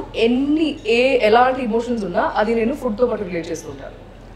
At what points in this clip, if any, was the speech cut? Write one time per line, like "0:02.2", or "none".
none